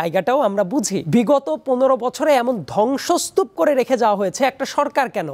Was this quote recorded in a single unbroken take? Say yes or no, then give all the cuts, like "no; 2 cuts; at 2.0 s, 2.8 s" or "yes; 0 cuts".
no; 1 cut; at 1.0 s